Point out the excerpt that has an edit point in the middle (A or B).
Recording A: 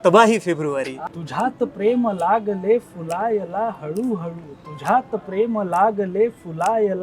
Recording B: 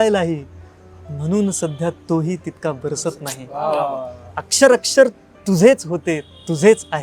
A